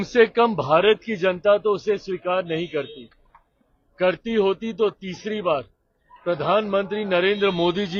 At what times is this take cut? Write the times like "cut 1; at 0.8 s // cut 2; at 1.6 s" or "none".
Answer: none